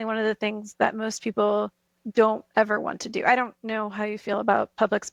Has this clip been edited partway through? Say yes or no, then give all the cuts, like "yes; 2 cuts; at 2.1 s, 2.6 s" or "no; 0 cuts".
no; 0 cuts